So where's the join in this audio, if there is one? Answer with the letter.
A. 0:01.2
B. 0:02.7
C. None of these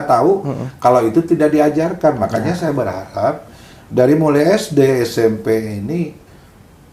C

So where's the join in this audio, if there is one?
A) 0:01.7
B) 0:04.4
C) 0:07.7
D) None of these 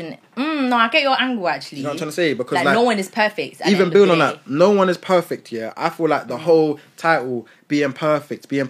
D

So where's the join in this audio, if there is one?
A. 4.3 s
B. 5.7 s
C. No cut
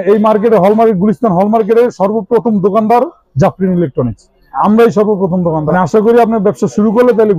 B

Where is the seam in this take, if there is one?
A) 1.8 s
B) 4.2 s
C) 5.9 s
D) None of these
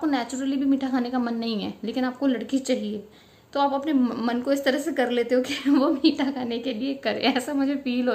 D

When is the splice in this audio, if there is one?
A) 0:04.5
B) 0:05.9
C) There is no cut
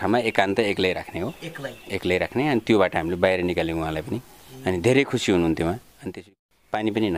B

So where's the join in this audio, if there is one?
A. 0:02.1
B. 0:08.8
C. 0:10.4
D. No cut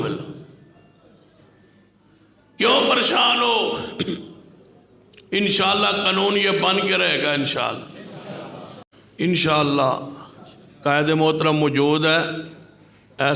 B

